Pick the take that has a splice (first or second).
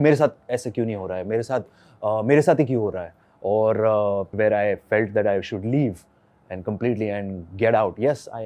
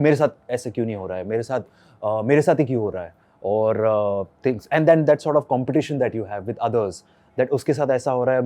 first